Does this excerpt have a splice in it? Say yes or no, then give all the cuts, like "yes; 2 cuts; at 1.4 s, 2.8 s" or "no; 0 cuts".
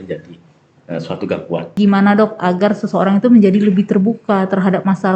yes; 1 cut; at 1.8 s